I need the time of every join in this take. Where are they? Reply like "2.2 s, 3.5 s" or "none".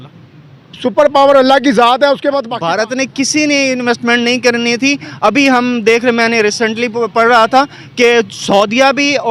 2.5 s